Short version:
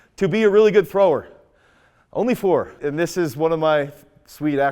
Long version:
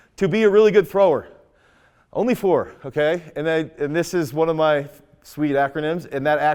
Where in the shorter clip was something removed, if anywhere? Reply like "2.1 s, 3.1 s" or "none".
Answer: 2.7 s